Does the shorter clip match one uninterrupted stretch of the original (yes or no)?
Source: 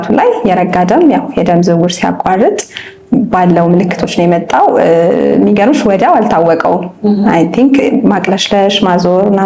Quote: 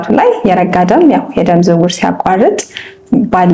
yes